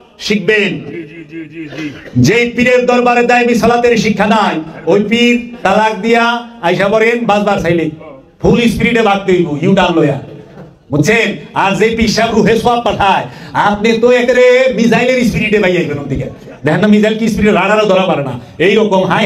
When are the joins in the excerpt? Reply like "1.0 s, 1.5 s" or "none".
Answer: none